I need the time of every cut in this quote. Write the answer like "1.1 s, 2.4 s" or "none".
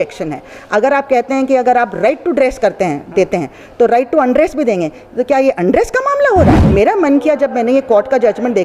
6.6 s